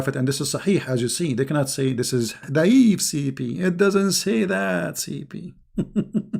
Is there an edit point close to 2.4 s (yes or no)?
yes